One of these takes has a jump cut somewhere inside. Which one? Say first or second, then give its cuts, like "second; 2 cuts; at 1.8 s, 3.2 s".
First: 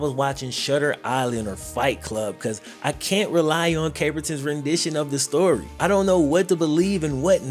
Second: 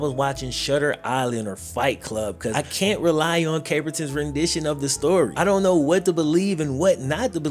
second; 2 cuts; at 2.5 s, 5.3 s